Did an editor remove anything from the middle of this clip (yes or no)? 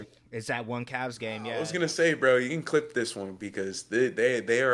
yes